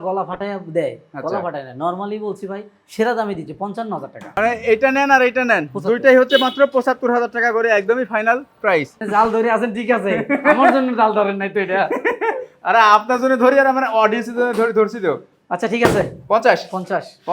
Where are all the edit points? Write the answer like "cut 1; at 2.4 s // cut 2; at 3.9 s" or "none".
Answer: cut 1; at 4.3 s // cut 2; at 9.0 s